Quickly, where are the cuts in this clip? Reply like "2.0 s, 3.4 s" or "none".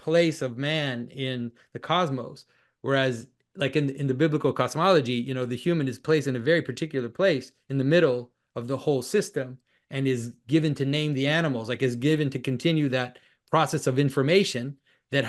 none

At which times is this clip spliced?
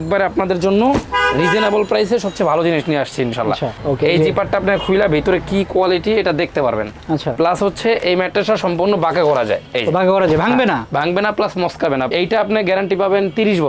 3.8 s, 12.1 s

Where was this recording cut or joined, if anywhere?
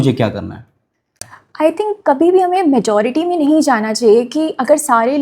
1.4 s

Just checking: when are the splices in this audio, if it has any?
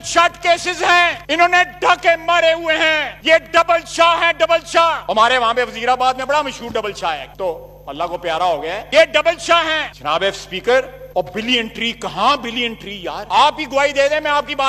none

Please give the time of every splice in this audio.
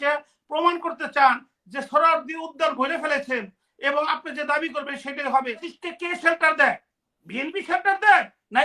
5.7 s

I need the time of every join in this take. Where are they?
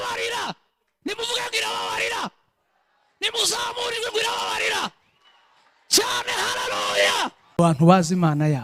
7.5 s

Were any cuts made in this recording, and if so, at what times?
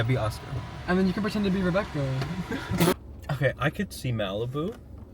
2.9 s

